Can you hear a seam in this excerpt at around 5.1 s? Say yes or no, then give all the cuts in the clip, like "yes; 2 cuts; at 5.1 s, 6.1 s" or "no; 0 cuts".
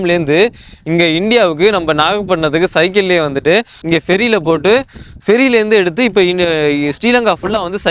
no; 1 cut; at 3.7 s